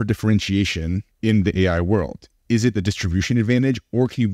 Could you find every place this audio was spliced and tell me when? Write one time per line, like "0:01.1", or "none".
0:01.1